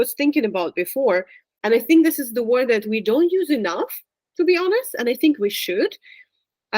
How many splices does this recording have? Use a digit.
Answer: 1